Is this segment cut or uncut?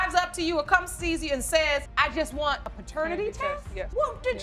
uncut